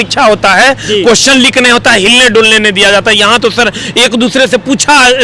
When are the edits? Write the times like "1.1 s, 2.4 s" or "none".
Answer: none